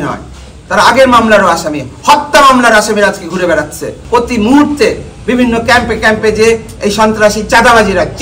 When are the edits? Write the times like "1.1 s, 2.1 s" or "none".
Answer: 4.0 s